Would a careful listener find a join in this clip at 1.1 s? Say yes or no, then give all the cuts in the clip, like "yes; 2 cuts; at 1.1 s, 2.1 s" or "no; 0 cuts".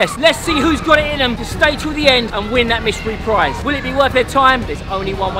no; 0 cuts